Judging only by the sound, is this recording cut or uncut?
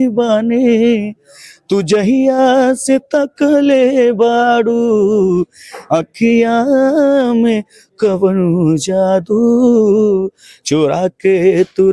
uncut